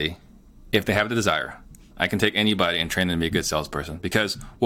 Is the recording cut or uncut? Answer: uncut